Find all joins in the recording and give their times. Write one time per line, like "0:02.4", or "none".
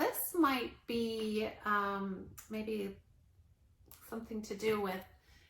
none